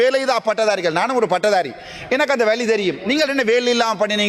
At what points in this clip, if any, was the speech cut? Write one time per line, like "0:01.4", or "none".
none